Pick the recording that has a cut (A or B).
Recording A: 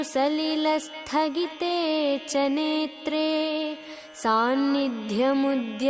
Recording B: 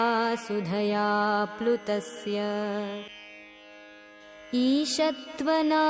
B